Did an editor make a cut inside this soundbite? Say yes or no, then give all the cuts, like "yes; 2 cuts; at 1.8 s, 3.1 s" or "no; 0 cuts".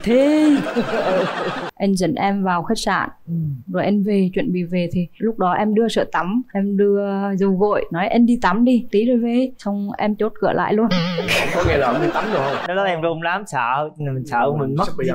yes; 2 cuts; at 1.6 s, 12.6 s